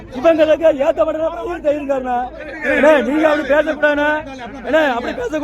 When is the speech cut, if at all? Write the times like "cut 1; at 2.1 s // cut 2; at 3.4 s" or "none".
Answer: cut 1; at 2.6 s